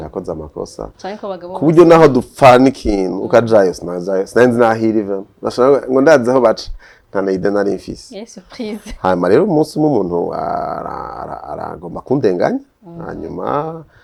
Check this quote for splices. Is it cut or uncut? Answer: uncut